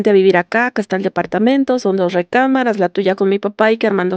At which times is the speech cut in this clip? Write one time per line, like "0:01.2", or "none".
none